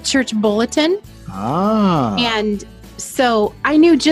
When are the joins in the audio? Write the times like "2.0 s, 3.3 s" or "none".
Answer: none